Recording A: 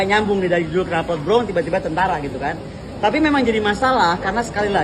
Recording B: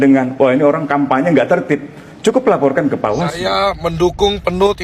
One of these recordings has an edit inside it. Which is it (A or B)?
B